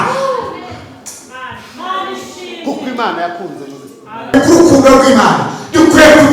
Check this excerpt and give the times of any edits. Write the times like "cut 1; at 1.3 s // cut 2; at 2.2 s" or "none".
cut 1; at 4.3 s